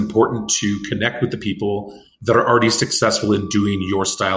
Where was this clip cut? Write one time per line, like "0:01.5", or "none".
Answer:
none